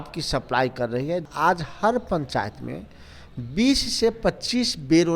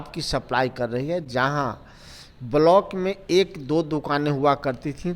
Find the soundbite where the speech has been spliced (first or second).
first